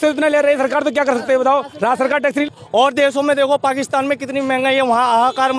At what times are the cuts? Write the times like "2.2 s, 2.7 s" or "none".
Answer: 2.4 s